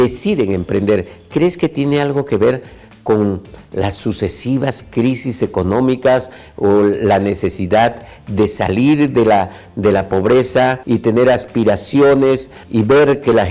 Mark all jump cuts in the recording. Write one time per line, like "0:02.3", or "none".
0:10.8
0:12.6